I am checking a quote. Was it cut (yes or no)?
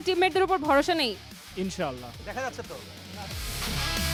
no